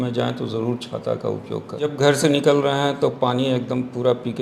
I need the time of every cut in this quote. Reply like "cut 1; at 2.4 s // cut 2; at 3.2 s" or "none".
cut 1; at 1.9 s